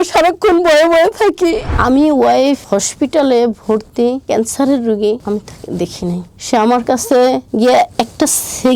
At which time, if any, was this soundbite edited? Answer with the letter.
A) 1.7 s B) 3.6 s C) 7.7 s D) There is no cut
A